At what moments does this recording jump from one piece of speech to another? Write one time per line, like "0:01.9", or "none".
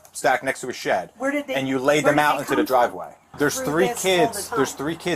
0:03.3